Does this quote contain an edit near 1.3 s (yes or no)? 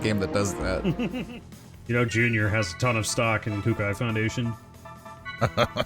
yes